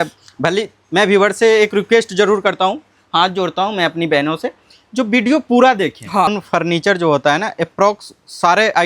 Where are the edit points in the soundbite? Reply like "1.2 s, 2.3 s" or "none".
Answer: 6.3 s

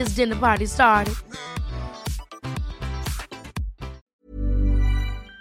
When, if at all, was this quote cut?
4.0 s

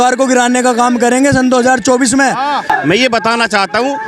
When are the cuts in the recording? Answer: 2.7 s

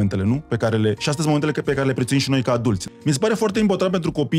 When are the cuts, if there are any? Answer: 2.8 s

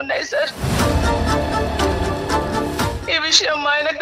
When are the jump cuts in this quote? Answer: 3.0 s

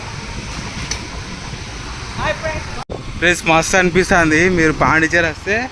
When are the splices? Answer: 2.8 s

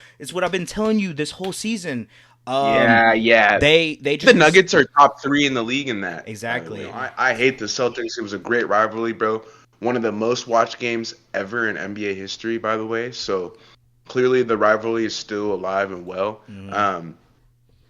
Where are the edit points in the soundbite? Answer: 7.1 s

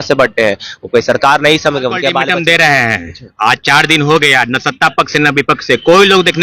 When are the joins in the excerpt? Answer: 2.2 s

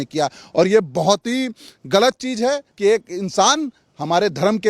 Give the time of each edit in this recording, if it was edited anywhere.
2.7 s

